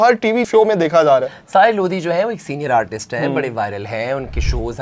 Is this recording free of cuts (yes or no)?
yes